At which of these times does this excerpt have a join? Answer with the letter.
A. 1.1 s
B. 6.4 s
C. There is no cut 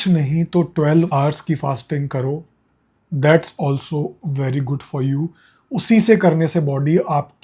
A